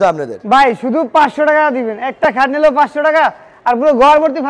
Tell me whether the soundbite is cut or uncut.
uncut